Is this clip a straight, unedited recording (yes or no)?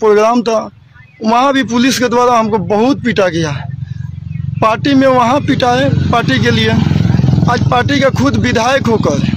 yes